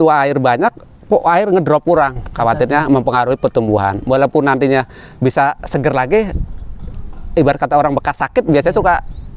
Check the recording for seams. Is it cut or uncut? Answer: uncut